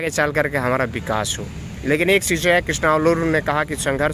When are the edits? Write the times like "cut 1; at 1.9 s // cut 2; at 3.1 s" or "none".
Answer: none